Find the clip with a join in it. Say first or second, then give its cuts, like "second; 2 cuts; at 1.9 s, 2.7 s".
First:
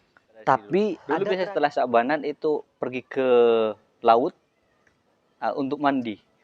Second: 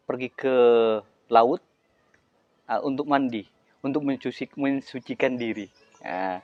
first; 1 cut; at 1.0 s